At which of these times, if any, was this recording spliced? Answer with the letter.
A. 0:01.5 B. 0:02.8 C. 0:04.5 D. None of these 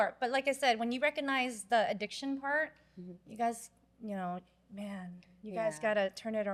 D